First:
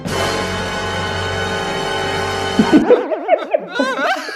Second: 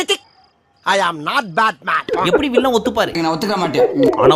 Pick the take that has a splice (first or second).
second